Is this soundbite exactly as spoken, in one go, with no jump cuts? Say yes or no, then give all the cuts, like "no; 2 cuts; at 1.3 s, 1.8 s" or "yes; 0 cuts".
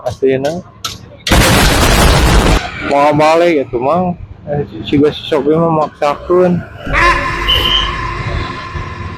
yes; 0 cuts